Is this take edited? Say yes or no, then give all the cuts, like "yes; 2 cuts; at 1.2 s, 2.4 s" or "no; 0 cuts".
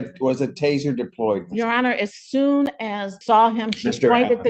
yes; 1 cut; at 3.1 s